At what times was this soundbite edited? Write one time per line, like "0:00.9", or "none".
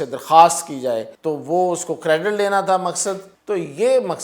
0:01.1
0:03.3